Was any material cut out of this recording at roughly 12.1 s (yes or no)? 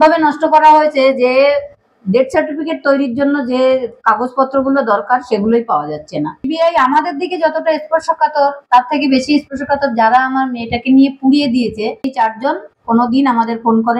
yes